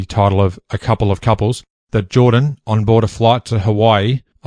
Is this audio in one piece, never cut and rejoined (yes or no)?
yes